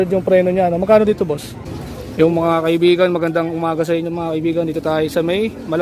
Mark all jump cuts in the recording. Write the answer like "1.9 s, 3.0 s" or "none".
2.0 s